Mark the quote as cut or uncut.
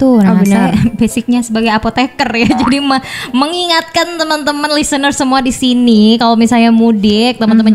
uncut